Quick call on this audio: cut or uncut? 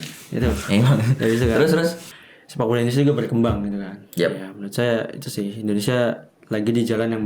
cut